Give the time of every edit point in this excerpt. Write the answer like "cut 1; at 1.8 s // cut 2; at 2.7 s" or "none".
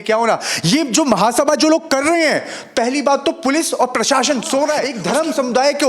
cut 1; at 4.9 s